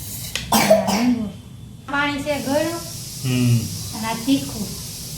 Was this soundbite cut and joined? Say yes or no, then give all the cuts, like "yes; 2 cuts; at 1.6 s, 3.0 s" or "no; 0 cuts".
yes; 1 cut; at 1.9 s